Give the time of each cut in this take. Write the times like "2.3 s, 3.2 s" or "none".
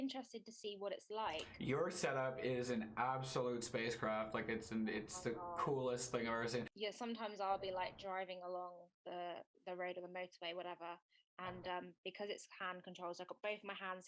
6.7 s